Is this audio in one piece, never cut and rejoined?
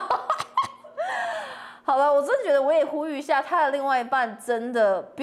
yes; 0 cuts

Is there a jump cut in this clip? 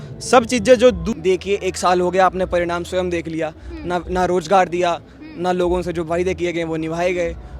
yes; 1 cut; at 1.1 s

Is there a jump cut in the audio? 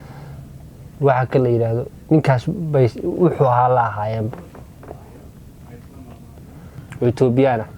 yes; 1 cut; at 6.4 s

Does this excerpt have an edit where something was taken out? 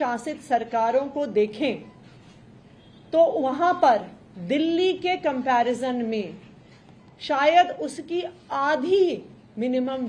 no; 0 cuts

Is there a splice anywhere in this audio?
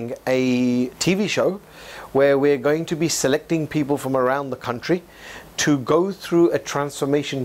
no; 0 cuts

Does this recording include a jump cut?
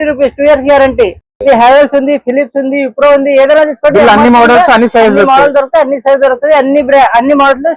no; 0 cuts

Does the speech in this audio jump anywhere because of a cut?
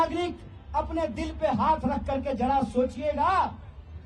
no; 0 cuts

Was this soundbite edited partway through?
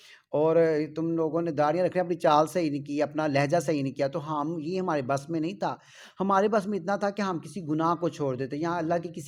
no; 0 cuts

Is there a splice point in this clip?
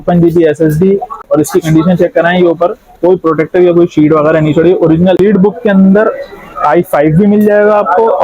yes; 2 cuts; at 1.2 s, 5.2 s

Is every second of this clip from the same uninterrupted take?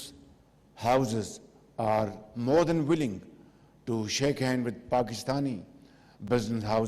yes; 0 cuts

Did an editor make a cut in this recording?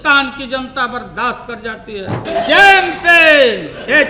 yes; 1 cut; at 2.2 s

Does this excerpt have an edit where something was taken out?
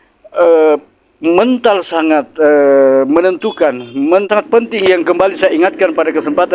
yes; 1 cut; at 4.3 s

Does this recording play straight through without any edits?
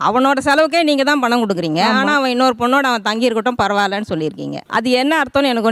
yes; 0 cuts

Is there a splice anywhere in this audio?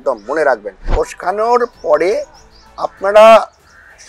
yes; 1 cut; at 0.9 s

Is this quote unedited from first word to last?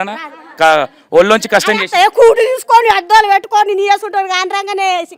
yes; 0 cuts

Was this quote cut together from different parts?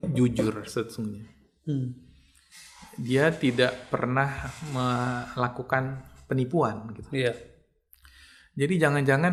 no; 0 cuts

